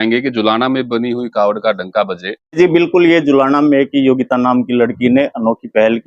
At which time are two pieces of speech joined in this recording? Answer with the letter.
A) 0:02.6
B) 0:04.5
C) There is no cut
A